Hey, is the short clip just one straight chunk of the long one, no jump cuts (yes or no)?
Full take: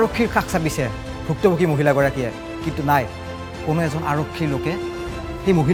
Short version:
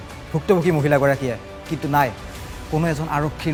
yes